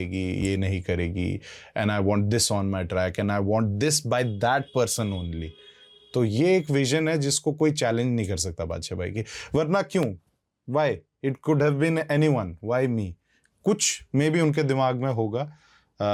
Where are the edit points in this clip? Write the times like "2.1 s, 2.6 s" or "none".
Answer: none